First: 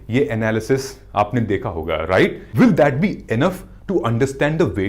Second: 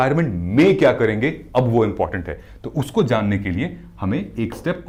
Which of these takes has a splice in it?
first; 1 cut; at 2.4 s

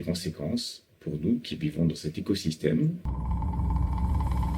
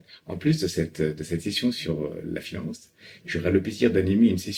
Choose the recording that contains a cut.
first; 1 cut; at 3.1 s

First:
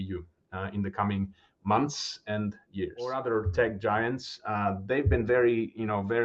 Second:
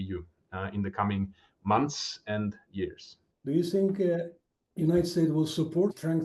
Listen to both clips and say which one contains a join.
first; 1 cut; at 3.1 s

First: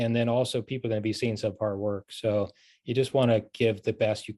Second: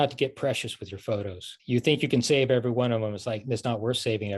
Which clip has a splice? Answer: second; 1 cut; at 1.5 s

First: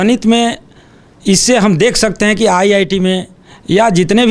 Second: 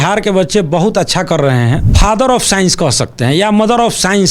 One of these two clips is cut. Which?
second; 1 cut; at 1.9 s

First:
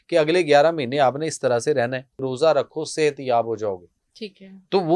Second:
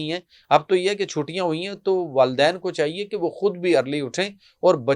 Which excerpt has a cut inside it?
first; 1 cut; at 2.2 s

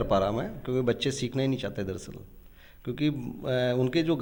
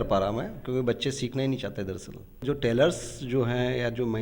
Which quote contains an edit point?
second; 1 cut; at 2.4 s

